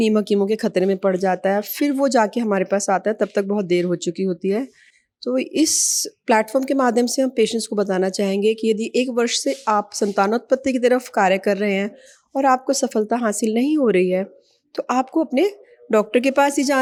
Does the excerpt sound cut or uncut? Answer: uncut